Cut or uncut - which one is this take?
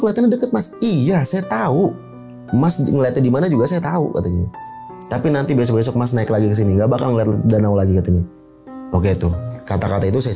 uncut